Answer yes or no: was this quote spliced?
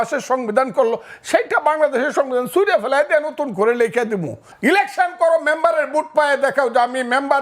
yes